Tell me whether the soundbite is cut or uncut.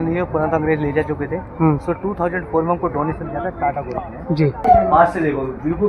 cut